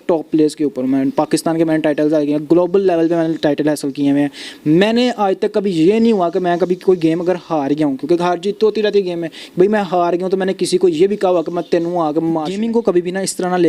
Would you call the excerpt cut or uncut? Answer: cut